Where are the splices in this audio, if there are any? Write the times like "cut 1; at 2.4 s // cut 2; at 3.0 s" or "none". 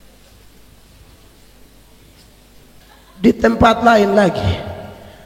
cut 1; at 2.8 s